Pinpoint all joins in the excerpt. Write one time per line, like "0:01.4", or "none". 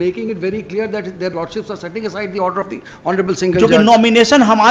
none